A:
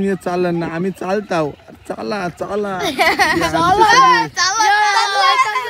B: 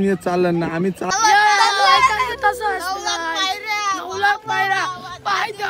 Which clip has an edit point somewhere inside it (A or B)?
B